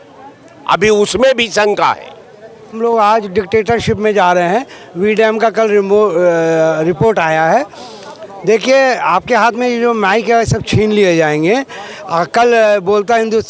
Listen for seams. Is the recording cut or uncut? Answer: cut